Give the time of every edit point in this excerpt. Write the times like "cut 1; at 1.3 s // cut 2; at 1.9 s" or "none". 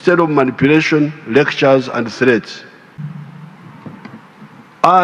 cut 1; at 3.0 s